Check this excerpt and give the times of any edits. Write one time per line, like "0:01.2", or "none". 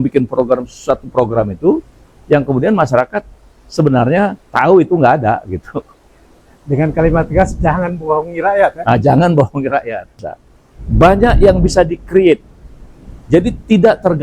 0:10.3